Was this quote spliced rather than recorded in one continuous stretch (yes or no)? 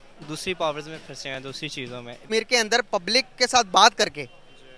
yes